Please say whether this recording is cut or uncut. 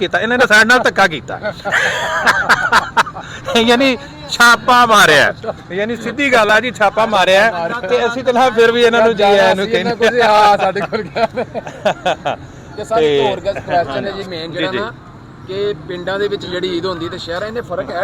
uncut